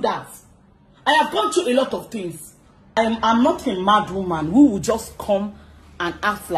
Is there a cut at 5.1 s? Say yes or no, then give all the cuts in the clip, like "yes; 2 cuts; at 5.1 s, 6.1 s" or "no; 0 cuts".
no; 1 cut; at 3.0 s